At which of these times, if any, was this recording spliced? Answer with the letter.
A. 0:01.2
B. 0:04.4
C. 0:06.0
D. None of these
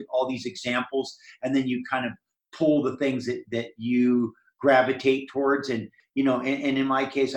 C